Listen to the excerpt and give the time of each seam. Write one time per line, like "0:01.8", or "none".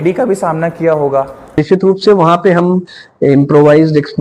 0:01.6